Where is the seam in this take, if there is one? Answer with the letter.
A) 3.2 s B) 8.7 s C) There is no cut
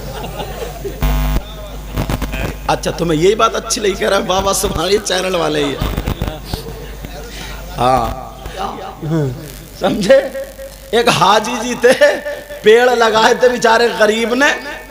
B